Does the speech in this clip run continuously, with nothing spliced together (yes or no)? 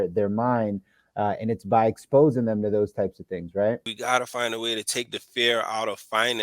no